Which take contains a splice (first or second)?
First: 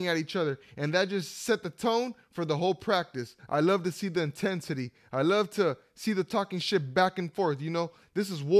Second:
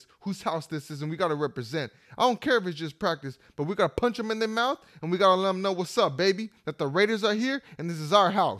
first